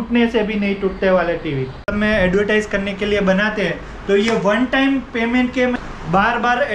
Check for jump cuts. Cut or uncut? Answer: cut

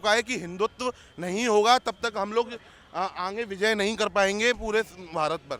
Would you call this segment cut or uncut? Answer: uncut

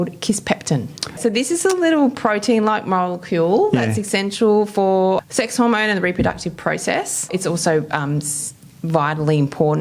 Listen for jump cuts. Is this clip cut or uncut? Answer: cut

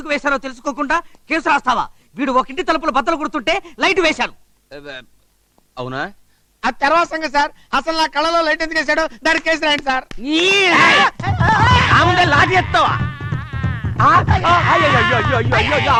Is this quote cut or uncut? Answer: uncut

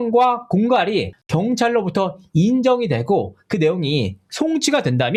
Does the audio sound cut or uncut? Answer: uncut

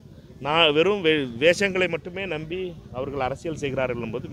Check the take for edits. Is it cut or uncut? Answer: uncut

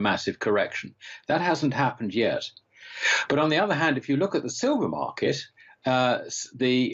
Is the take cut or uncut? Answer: uncut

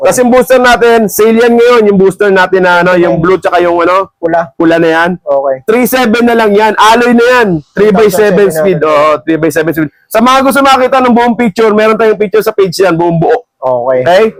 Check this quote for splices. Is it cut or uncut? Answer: uncut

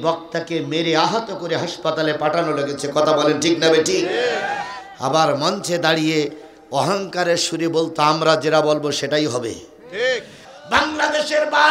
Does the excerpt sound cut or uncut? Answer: cut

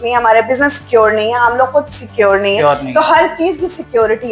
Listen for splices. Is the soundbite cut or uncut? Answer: uncut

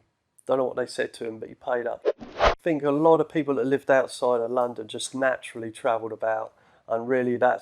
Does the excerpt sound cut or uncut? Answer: cut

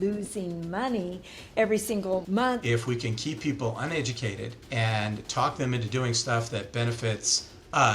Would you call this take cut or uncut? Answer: cut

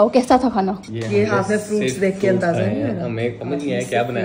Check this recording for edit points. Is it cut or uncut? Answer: uncut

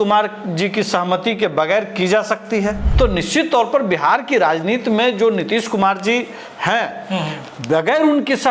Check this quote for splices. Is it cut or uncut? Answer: cut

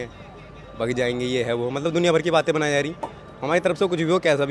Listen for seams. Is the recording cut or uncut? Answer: uncut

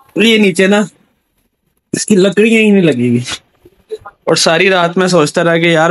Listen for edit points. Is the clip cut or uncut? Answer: uncut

